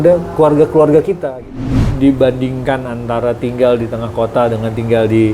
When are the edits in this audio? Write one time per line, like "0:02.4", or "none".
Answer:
0:01.9